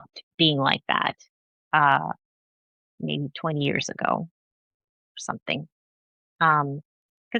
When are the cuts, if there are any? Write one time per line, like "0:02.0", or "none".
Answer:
none